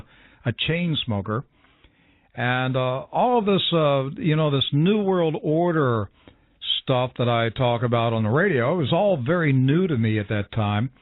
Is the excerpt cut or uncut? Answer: cut